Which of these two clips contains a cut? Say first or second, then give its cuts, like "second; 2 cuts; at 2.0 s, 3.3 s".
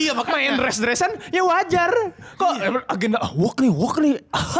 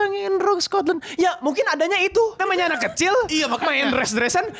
second; 1 cut; at 2.4 s